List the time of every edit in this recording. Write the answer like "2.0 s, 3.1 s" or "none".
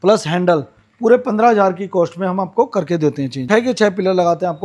3.4 s